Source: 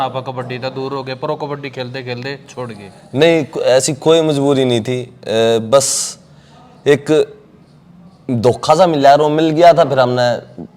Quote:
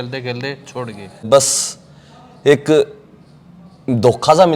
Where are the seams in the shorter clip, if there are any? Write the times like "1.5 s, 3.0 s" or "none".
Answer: 1.2 s